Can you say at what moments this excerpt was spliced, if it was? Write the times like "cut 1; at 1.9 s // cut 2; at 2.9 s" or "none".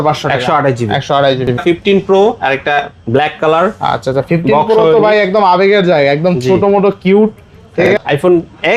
cut 1; at 1.6 s // cut 2; at 7.9 s